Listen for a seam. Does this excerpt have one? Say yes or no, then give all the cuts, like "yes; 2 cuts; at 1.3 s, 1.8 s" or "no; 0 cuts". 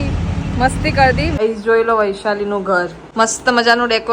yes; 2 cuts; at 1.4 s, 3.0 s